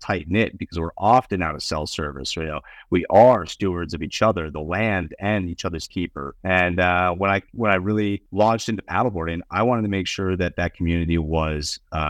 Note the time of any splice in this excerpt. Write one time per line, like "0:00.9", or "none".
0:06.3
0:08.2